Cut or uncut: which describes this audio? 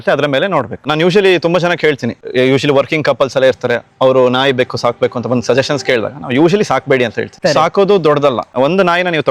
cut